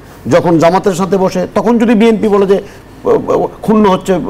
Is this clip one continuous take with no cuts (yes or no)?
yes